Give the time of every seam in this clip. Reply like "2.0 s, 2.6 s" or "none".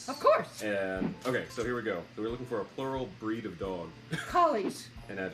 3.1 s, 4.1 s